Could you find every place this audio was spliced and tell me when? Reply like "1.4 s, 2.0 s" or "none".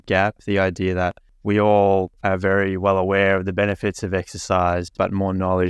1.3 s, 2.1 s